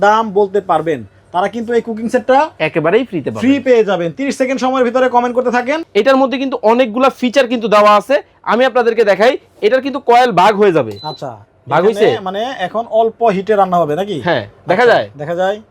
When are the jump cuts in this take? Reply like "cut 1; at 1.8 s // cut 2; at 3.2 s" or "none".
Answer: cut 1; at 5.8 s

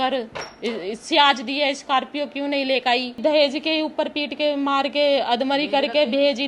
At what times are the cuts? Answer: cut 1; at 3.2 s

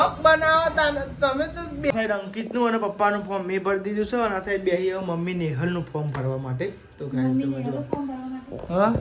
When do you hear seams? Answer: cut 1; at 1.9 s

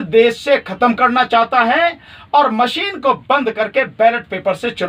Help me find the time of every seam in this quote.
none

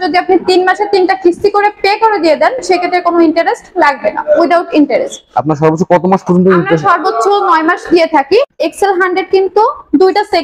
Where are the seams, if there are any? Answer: cut 1; at 8.7 s

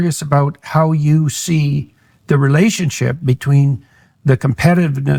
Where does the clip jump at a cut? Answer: none

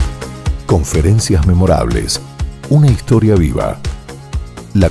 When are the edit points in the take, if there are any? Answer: none

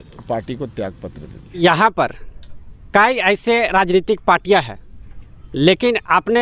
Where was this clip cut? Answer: cut 1; at 1.6 s

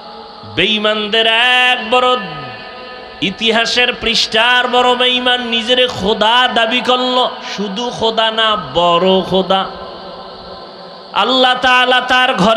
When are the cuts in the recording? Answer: cut 1; at 11.0 s

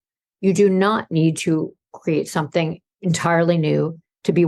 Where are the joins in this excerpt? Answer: cut 1; at 2.9 s

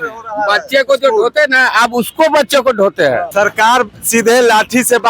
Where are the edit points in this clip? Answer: cut 1; at 3.3 s

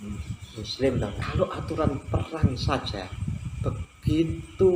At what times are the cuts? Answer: cut 1; at 1.2 s

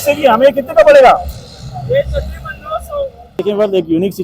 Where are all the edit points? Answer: cut 1; at 3.2 s

